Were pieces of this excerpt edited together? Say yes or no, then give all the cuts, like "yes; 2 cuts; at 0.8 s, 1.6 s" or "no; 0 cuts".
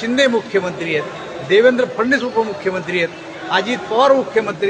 no; 0 cuts